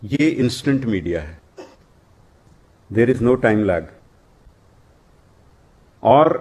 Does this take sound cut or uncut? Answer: uncut